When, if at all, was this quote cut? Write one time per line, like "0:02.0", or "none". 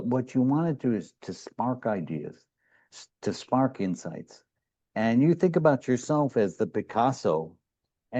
none